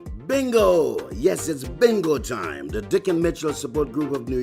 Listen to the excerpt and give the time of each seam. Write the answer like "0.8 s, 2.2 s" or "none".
1.0 s